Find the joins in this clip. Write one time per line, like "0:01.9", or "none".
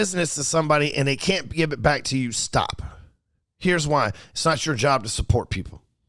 none